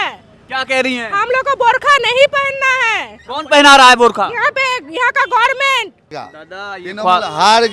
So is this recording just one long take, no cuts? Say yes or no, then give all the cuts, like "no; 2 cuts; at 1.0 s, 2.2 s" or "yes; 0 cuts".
no; 1 cut; at 6.2 s